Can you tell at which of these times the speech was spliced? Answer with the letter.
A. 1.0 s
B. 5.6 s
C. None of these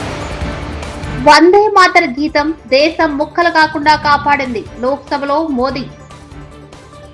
A